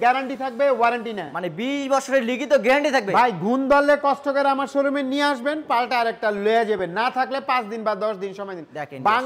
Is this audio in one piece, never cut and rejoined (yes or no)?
yes